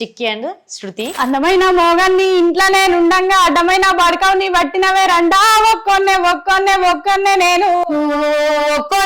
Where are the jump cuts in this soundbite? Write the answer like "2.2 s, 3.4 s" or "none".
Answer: 1.1 s